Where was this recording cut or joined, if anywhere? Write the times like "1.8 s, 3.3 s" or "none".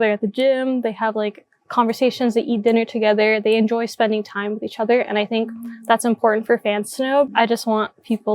7.3 s